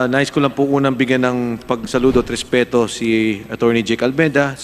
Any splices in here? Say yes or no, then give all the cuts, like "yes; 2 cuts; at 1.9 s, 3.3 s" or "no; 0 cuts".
no; 0 cuts